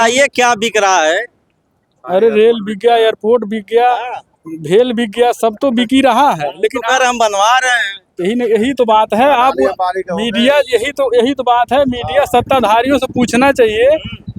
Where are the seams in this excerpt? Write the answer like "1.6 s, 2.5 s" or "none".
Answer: none

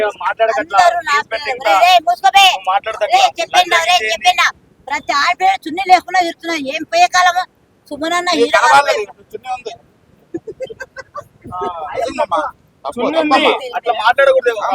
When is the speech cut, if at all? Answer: 2.6 s

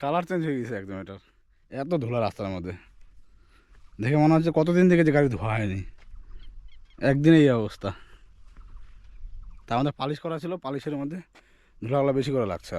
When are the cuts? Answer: none

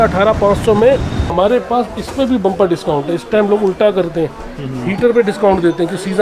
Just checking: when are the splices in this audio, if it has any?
1.3 s

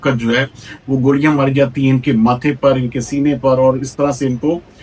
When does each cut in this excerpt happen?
none

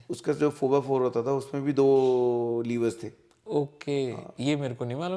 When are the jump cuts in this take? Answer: 3.4 s

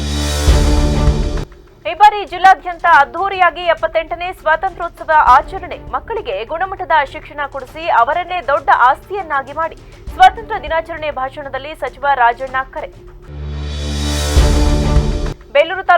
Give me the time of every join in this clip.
1.5 s

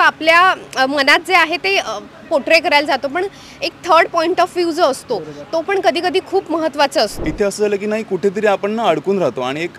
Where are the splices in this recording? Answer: 7.2 s

